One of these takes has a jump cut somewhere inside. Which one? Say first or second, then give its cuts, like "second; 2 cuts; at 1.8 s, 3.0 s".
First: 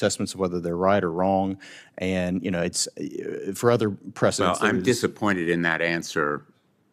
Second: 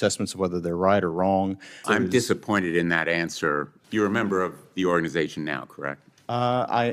second; 2 cuts; at 1.8 s, 3.8 s